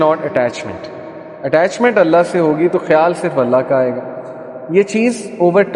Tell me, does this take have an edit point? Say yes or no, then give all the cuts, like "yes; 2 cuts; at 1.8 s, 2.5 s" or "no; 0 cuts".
no; 0 cuts